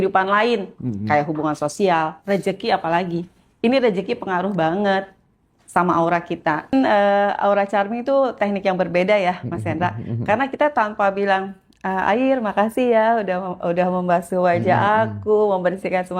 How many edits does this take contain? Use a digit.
1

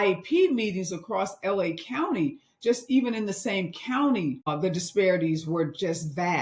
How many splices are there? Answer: 1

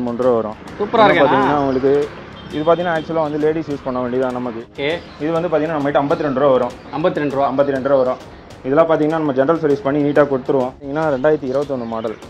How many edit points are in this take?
2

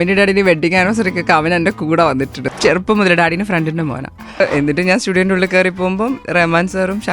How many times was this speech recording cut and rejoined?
2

